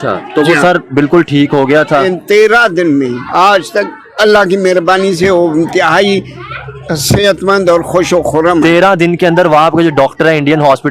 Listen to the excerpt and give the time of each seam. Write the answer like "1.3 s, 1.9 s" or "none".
none